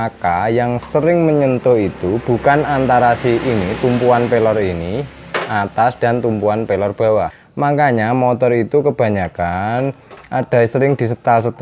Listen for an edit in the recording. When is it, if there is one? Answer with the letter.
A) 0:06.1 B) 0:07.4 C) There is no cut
B